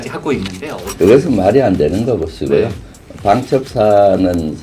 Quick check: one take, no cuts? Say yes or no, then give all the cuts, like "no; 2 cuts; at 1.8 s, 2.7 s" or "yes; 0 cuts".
yes; 0 cuts